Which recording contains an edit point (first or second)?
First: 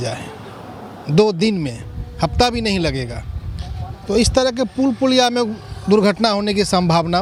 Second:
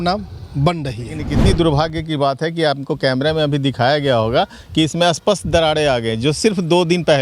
second